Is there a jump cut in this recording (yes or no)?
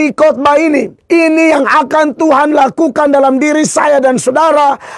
yes